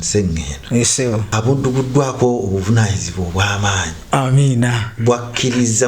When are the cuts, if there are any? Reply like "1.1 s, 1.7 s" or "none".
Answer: 1.3 s